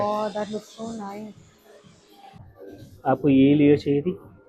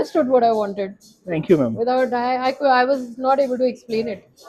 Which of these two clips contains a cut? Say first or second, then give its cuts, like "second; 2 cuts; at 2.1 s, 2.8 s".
first; 1 cut; at 2.4 s